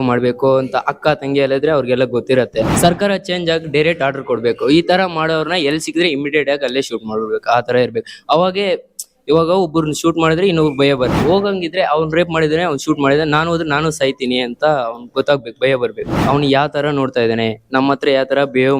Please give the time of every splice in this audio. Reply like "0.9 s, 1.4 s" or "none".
2.7 s, 11.1 s, 16.2 s